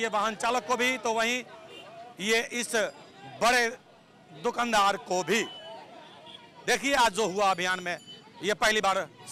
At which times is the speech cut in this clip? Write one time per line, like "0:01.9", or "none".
none